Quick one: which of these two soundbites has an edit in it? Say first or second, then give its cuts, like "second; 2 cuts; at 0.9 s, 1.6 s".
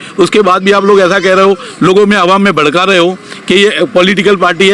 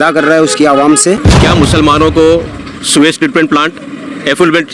second; 1 cut; at 1.3 s